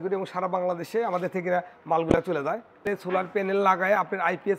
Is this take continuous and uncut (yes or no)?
no